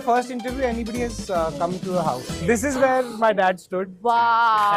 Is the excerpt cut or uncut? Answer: uncut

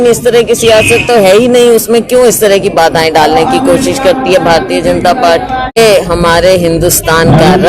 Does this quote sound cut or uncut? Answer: cut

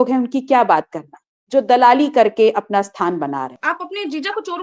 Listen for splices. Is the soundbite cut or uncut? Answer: cut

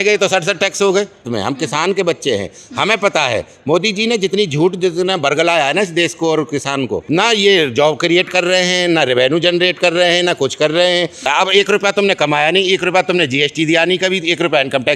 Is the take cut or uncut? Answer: cut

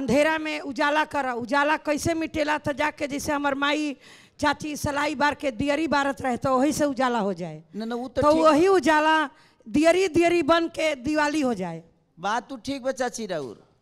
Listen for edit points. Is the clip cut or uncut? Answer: uncut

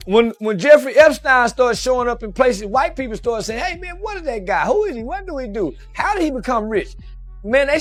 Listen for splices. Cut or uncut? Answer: uncut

